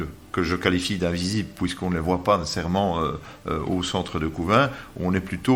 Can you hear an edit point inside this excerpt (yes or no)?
no